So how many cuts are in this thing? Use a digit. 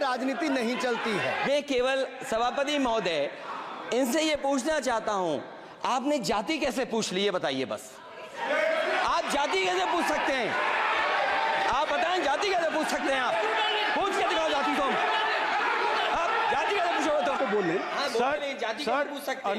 2